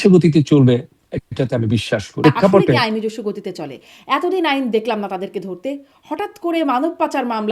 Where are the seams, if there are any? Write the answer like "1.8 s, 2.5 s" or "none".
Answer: 2.2 s